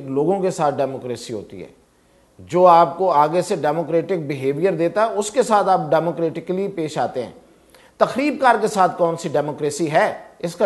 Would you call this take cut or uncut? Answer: uncut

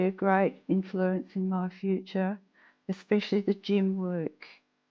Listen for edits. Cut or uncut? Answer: uncut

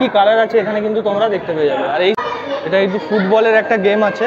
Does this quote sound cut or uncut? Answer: uncut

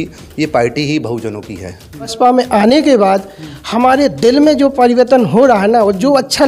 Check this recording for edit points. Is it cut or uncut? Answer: cut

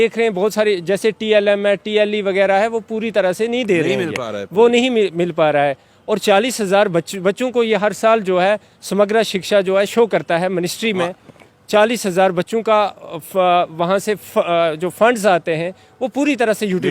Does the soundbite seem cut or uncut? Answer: uncut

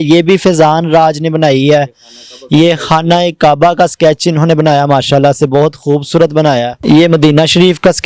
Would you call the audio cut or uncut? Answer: cut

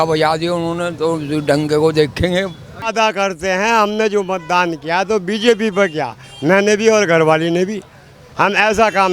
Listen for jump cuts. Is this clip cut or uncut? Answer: cut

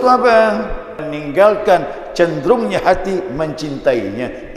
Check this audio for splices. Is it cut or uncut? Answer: cut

